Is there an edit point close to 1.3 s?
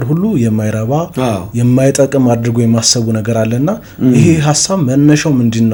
no; 0 cuts

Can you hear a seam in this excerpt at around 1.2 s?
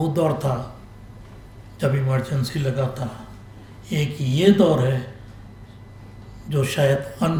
no; 0 cuts

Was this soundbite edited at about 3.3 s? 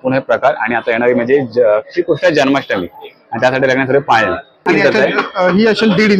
no; 1 cut; at 4.6 s

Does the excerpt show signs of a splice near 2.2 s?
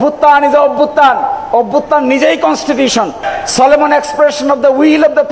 no; 0 cuts

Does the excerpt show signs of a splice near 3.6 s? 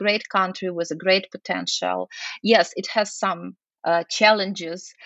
yes; 1 cut; at 3.6 s

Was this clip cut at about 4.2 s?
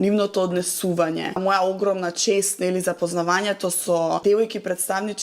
yes; 2 cuts; at 1.4 s, 4.2 s

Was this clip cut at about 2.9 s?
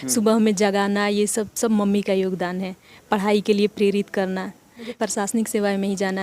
no; 1 cut; at 5.0 s

